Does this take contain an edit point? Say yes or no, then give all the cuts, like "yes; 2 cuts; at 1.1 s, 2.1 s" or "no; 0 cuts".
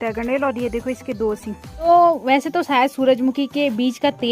yes; 1 cut; at 1.9 s